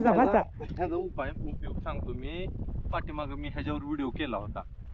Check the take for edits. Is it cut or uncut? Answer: uncut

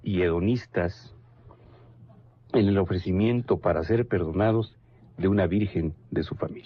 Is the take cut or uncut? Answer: cut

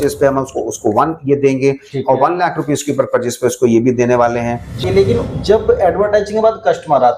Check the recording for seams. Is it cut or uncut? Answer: cut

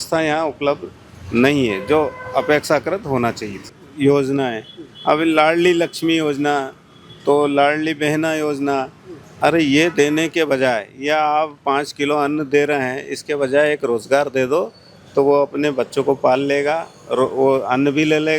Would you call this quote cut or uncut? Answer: cut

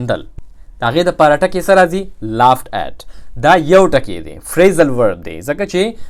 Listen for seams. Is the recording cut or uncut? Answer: uncut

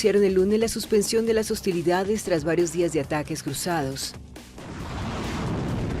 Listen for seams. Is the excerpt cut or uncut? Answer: cut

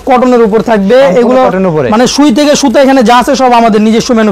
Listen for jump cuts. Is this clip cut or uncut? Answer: uncut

